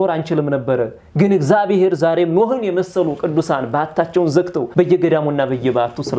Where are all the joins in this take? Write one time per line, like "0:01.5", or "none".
0:04.7